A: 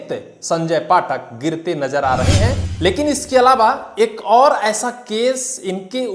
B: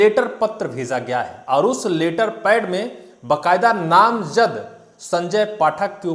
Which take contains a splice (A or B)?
A